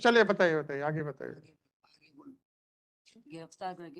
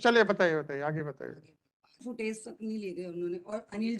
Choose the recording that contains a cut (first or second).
second